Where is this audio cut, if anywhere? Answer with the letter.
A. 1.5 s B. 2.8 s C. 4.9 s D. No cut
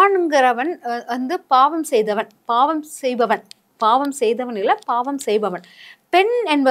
D